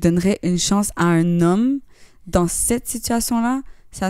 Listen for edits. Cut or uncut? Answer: uncut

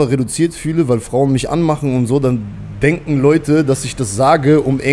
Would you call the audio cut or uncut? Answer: uncut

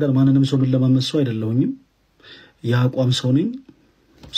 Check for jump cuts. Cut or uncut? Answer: uncut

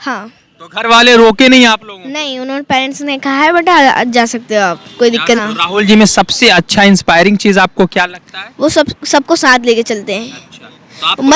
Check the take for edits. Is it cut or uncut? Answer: cut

